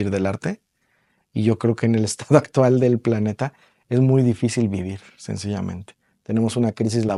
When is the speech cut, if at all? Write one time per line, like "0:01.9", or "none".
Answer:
none